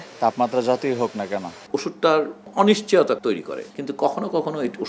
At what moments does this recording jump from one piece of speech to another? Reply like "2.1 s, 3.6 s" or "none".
1.6 s, 3.6 s